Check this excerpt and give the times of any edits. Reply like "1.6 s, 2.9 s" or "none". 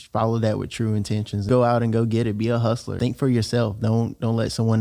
1.4 s, 2.9 s